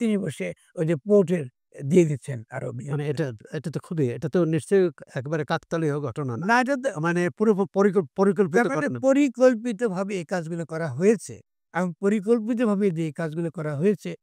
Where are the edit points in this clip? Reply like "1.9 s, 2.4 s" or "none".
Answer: none